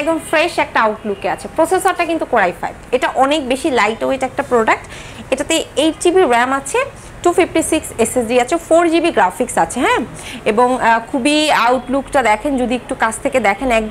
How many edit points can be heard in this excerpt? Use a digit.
0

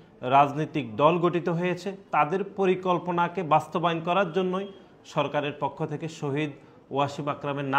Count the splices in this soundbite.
0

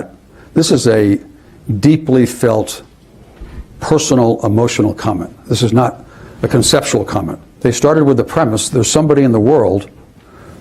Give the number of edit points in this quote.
1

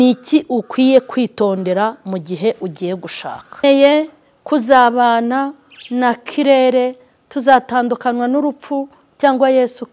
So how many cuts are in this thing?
1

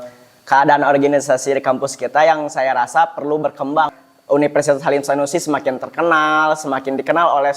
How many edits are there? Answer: 1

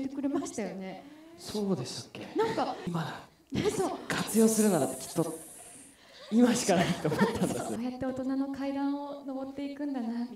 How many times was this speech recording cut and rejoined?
2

